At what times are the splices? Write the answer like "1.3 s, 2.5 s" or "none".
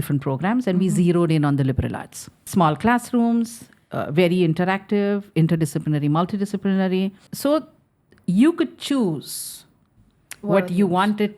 2.4 s, 7.3 s